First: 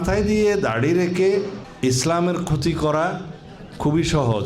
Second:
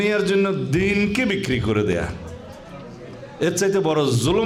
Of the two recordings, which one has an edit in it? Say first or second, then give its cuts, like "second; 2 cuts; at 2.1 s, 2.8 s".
first; 1 cut; at 1.6 s